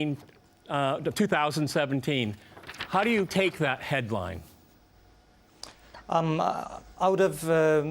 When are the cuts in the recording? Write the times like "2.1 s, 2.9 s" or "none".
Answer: 6.3 s